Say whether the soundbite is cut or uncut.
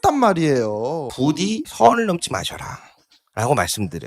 cut